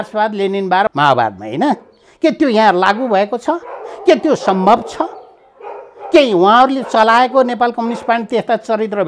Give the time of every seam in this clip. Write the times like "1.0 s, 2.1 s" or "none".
0.9 s